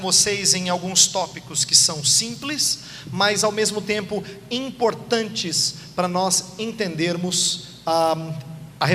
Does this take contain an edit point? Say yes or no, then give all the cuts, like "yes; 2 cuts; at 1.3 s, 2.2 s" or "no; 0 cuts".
yes; 1 cut; at 5.6 s